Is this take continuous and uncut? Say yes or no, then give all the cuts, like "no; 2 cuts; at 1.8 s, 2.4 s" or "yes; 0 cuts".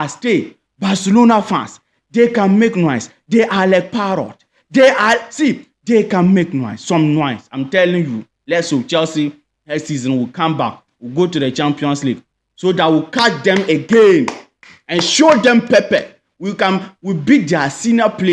yes; 0 cuts